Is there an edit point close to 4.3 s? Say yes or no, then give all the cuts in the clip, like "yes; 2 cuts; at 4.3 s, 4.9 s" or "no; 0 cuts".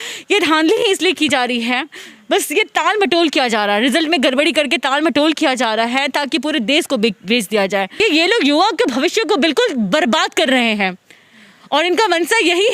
no; 1 cut; at 8.0 s